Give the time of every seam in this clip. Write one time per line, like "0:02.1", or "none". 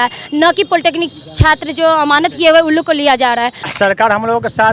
0:03.6